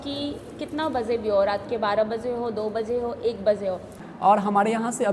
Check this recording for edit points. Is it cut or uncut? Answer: cut